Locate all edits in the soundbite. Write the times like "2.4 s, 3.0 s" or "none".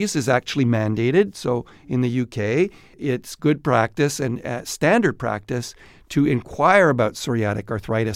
none

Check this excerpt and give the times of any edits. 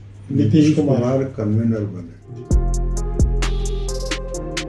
2.2 s

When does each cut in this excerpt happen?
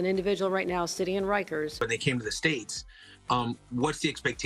1.7 s

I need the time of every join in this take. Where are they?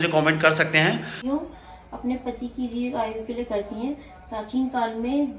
1.2 s

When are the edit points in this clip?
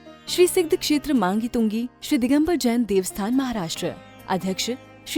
none

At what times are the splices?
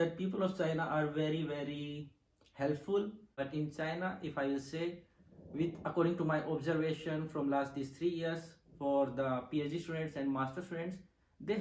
3.4 s

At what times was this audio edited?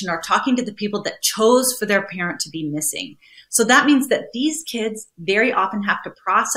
none

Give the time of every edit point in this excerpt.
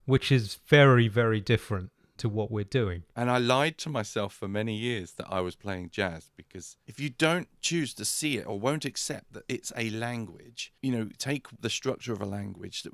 3.0 s, 6.7 s, 10.7 s

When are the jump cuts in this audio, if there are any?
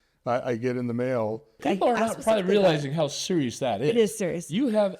1.6 s

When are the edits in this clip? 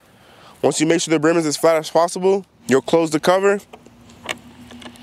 2.5 s, 4.1 s

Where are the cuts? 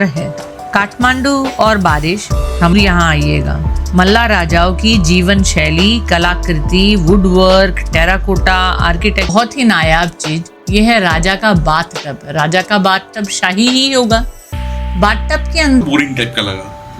2.7 s, 9.3 s, 15.8 s

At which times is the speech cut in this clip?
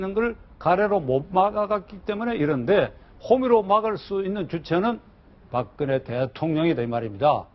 none

